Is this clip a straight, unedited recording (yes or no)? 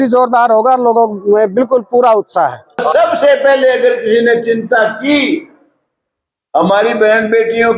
no